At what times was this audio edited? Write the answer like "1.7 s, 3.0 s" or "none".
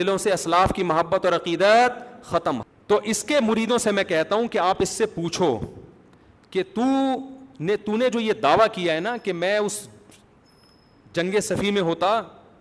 2.6 s